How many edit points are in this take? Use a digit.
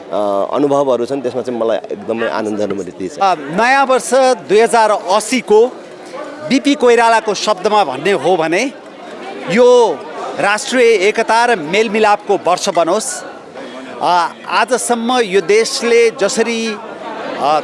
0